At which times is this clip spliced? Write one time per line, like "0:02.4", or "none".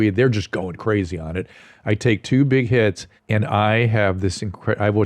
0:03.1